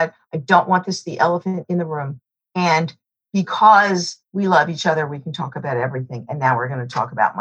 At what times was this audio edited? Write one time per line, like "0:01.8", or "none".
0:01.9